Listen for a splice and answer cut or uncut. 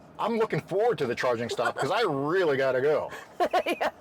uncut